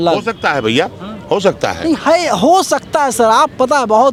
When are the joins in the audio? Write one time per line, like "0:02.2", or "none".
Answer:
none